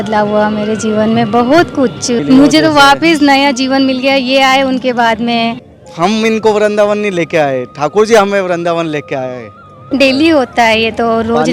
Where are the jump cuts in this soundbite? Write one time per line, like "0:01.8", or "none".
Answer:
0:02.2
0:05.7
0:09.9